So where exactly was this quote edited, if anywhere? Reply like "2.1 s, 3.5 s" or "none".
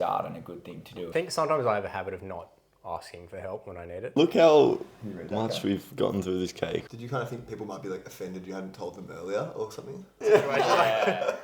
1.1 s, 4.2 s, 6.8 s, 10.1 s

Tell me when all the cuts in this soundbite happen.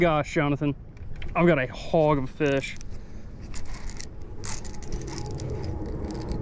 none

